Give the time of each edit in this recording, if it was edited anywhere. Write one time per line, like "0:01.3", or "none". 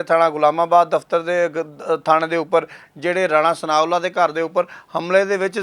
none